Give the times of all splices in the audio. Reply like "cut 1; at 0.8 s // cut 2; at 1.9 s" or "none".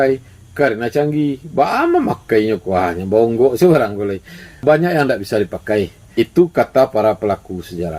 cut 1; at 4.6 s // cut 2; at 6.0 s